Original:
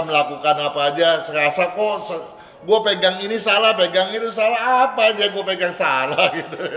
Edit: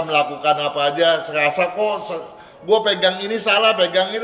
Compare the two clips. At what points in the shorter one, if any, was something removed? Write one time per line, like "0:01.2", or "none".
none